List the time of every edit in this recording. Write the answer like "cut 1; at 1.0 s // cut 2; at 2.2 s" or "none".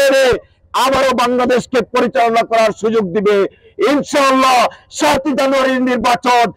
none